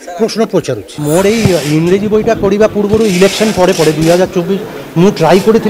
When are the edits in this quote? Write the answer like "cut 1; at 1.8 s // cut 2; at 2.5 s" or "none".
cut 1; at 0.9 s